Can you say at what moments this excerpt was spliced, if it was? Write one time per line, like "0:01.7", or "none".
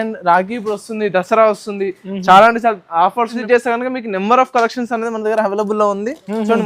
0:03.4